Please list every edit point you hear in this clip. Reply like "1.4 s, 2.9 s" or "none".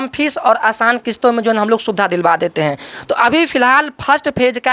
none